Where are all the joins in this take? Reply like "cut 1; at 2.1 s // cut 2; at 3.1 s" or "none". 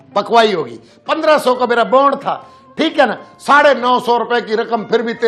none